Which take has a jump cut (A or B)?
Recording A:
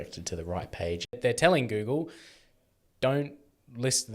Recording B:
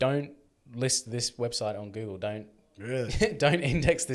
A